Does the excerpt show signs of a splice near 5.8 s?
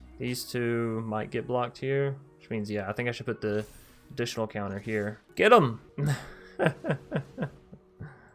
yes; 2 cuts; at 5.2 s, 5.8 s

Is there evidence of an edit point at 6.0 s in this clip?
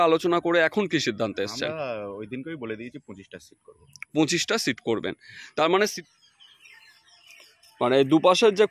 yes; 1 cut; at 6.0 s

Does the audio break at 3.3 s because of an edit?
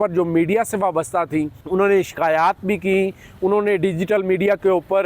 no; 1 cut; at 1.6 s

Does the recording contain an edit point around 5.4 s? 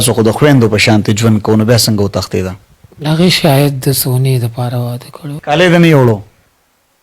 yes; 1 cut; at 5.4 s

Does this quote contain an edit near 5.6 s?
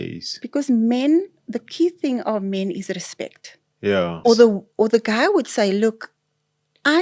no; 1 cut; at 4.2 s

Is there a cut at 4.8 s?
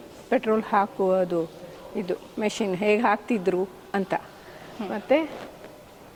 no; 0 cuts

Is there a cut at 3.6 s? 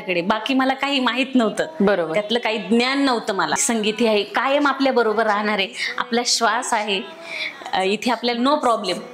yes; 1 cut; at 3.6 s

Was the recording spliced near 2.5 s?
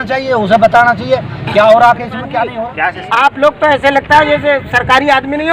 yes; 1 cut; at 2.5 s

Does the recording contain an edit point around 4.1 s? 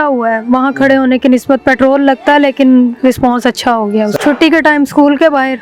yes; 1 cut; at 4.1 s

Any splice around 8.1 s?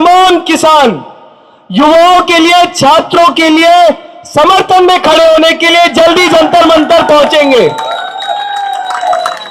no; 0 cuts

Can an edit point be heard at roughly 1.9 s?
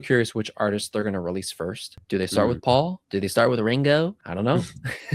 yes; 3 cuts; at 1.9 s, 3.0 s, 4.2 s

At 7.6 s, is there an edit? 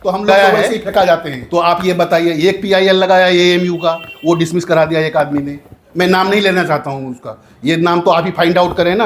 no; 1 cut; at 1.4 s

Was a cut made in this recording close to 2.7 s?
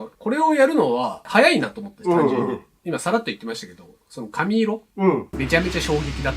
yes; 1 cut; at 2.7 s

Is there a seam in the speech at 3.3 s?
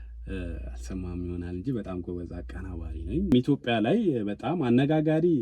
yes; 1 cut; at 3.3 s

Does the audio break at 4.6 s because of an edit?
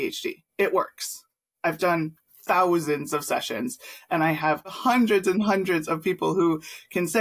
yes; 1 cut; at 4.6 s

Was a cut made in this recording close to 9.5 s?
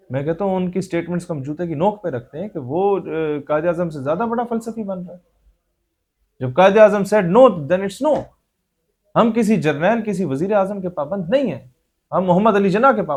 no; 0 cuts

